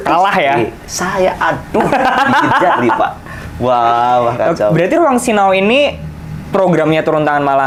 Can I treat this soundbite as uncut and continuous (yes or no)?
yes